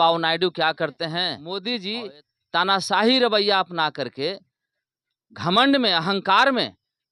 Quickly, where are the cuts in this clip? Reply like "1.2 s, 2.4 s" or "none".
1.4 s